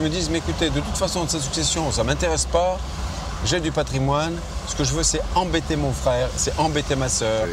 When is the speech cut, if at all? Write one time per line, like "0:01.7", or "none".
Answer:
none